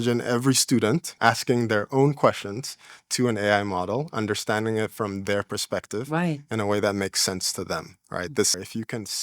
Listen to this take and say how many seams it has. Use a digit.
2